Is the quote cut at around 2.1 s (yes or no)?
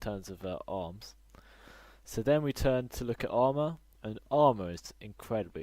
yes